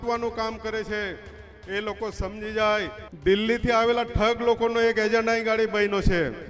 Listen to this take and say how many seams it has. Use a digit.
1